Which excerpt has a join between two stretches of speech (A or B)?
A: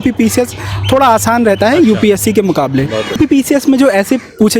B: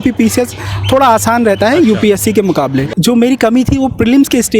B